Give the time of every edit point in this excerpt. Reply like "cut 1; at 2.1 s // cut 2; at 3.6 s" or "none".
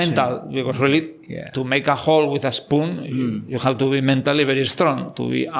none